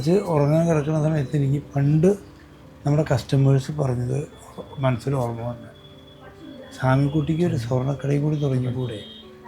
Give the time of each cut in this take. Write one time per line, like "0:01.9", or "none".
none